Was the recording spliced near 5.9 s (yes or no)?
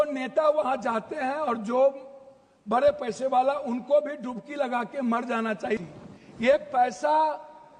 yes